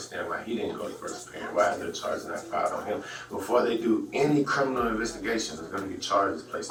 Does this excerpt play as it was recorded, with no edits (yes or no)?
yes